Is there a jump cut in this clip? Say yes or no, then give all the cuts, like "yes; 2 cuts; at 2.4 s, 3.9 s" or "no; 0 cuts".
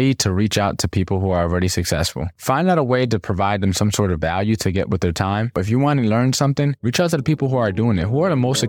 yes; 1 cut; at 5.5 s